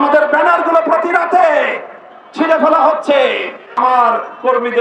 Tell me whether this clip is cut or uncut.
cut